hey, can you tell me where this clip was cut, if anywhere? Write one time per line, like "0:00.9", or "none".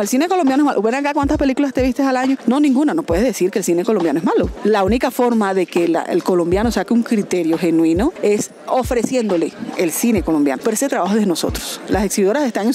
0:02.4
0:04.5
0:08.2
0:10.6
0:11.8